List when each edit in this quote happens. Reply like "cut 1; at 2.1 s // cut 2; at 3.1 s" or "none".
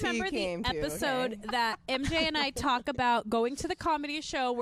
none

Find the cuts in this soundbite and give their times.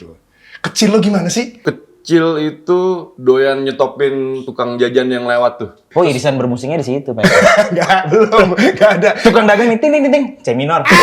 cut 1; at 1.6 s // cut 2; at 3.1 s // cut 3; at 4.4 s // cut 4; at 5.9 s

